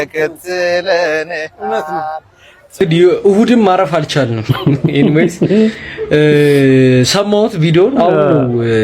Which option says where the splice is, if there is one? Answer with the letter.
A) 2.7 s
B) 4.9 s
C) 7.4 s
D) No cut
A